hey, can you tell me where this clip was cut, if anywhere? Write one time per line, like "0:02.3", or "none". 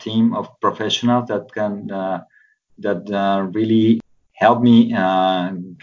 0:04.0